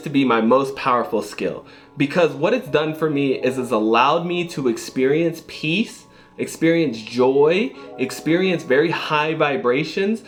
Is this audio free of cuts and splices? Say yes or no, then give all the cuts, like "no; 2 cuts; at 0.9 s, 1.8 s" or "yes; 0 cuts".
yes; 0 cuts